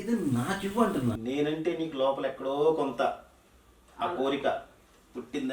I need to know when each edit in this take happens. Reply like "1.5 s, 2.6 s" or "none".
1.2 s